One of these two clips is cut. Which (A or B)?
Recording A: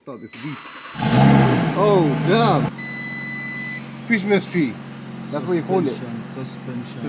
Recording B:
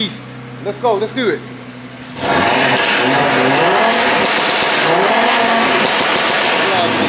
A